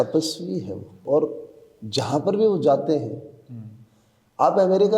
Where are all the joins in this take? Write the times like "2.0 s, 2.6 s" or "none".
1.0 s